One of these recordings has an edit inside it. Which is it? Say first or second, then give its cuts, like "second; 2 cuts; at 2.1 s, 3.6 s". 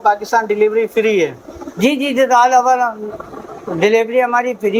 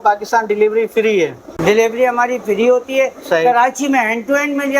second; 1 cut; at 1.5 s